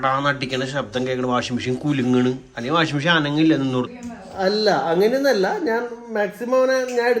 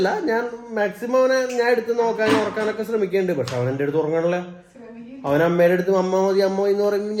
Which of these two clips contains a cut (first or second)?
first